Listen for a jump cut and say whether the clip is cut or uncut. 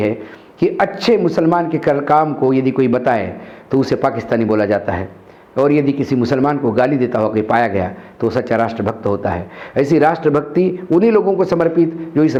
uncut